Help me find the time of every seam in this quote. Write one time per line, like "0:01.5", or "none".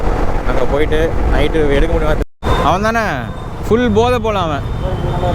0:02.2